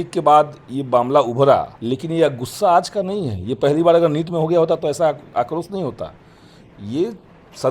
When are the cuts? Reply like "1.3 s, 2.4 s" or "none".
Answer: 1.7 s